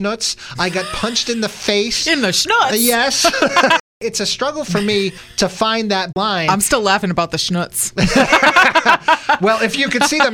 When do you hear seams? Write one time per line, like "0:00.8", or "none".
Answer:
0:03.9
0:05.2
0:06.1